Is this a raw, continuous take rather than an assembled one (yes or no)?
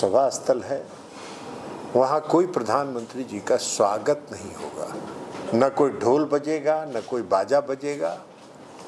no